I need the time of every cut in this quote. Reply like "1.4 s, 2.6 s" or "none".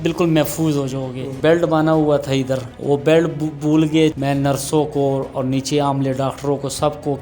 1.3 s, 2.7 s, 4.2 s